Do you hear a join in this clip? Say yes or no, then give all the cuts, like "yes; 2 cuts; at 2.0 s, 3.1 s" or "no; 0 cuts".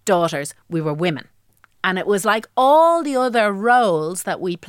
no; 0 cuts